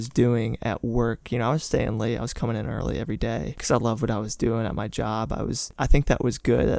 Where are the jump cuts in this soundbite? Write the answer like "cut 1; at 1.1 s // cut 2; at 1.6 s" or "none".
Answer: cut 1; at 5.7 s